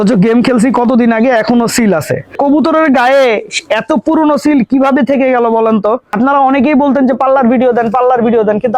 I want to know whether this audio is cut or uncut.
cut